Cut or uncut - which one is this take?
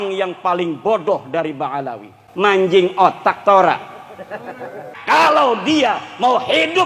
cut